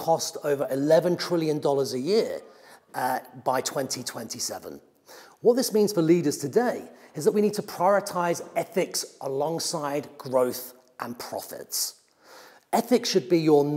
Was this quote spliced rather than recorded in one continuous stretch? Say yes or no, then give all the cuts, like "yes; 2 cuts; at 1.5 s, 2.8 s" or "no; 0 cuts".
no; 0 cuts